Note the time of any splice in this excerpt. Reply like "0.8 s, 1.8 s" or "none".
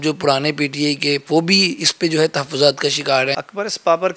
1.2 s, 3.4 s